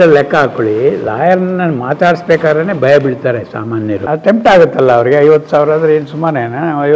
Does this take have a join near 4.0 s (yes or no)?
yes